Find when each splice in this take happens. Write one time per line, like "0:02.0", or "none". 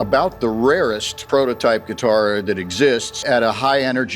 0:01.1
0:03.1

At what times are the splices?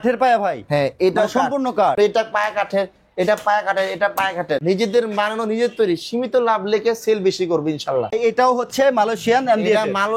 0:02.0
0:04.6
0:08.1

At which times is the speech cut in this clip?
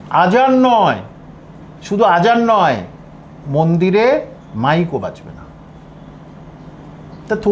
none

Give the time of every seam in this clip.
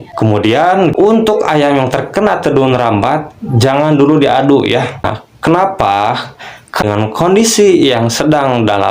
0:00.9
0:06.8

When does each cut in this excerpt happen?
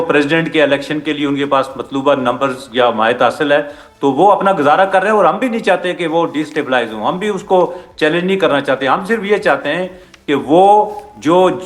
none

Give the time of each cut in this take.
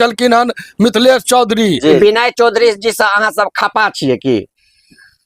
0:02.0

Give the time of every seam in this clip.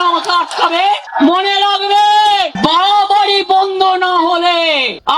0:01.1
0:02.5

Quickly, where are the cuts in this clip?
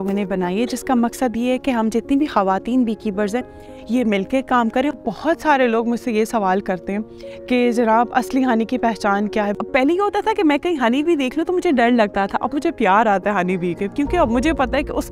0:05.0
0:09.6

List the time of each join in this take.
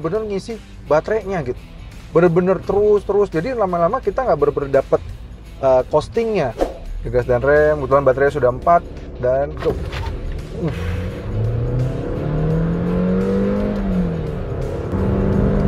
0:06.6

